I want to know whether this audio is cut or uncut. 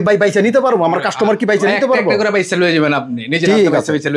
uncut